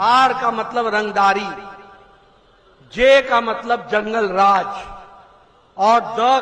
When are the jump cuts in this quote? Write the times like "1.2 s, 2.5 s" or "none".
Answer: none